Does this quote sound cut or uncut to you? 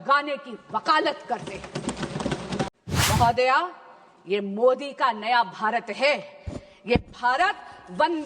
cut